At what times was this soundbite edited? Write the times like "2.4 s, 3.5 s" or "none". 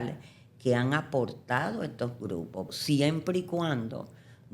2.7 s